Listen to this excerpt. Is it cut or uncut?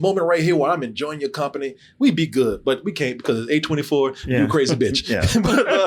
uncut